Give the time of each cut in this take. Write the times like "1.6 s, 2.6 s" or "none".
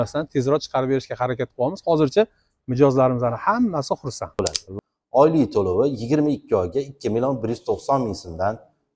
4.4 s